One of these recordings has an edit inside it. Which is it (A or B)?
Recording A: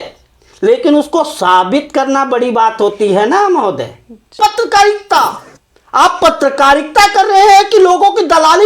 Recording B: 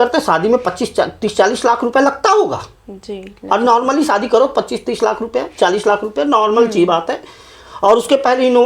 A